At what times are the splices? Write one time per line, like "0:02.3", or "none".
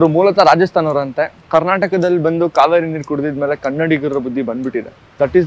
none